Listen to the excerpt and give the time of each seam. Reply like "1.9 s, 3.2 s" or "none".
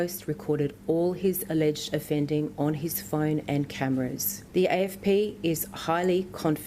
4.3 s